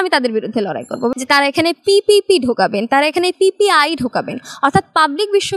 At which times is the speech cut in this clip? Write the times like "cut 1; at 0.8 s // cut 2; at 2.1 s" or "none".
cut 1; at 1.1 s